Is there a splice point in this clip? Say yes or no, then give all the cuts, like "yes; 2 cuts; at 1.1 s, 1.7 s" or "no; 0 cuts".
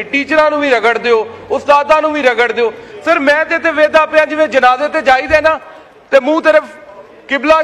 no; 0 cuts